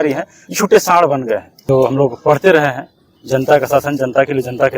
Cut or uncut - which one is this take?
cut